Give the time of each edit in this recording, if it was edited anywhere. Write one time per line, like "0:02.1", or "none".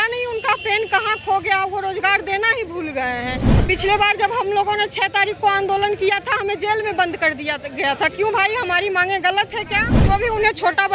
0:03.5
0:09.9